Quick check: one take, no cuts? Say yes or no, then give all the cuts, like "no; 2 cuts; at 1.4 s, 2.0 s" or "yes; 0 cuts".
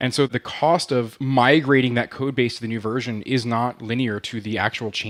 yes; 0 cuts